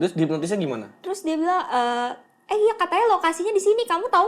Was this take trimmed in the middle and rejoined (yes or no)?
yes